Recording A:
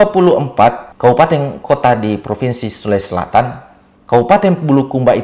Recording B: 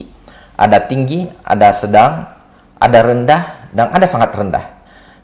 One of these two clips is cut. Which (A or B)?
A